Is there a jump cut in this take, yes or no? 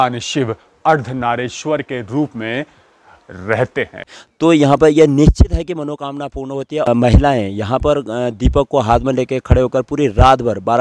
yes